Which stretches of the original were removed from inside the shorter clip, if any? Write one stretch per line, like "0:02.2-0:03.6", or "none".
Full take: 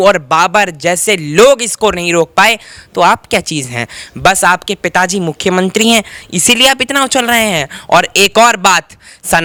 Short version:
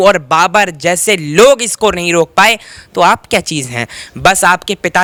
none